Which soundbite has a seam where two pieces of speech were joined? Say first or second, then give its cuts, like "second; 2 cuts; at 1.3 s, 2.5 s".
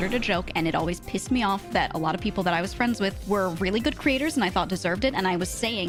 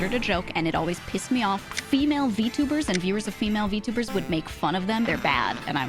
second; 2 cuts; at 1.6 s, 5.1 s